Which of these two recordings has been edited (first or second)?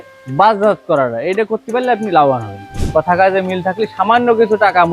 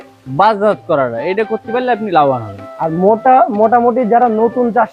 first